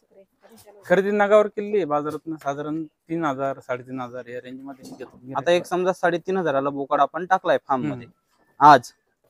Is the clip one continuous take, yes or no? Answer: no